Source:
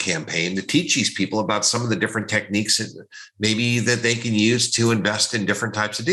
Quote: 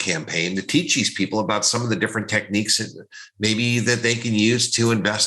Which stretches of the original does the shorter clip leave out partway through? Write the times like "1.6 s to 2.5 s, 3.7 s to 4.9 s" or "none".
none